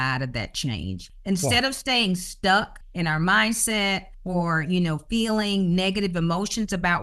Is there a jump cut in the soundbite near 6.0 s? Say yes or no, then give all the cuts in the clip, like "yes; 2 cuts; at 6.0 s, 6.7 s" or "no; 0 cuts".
no; 3 cuts; at 1.1 s, 2.8 s, 4.1 s